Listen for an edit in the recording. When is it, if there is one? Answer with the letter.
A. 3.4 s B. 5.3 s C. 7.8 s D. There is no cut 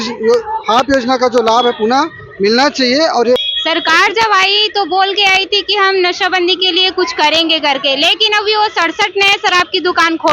A